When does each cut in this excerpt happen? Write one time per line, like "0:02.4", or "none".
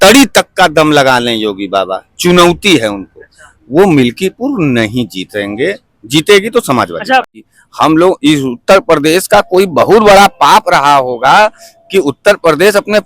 0:07.3